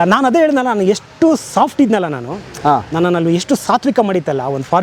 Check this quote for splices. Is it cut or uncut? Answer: uncut